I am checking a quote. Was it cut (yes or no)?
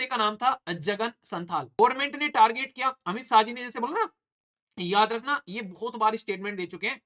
yes